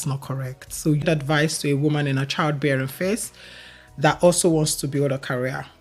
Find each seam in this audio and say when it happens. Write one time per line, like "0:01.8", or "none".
0:01.0